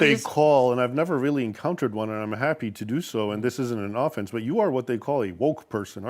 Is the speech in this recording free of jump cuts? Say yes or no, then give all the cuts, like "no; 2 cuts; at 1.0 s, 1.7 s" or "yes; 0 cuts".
yes; 0 cuts